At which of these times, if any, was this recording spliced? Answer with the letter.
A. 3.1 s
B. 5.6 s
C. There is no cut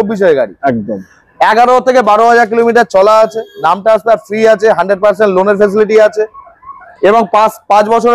C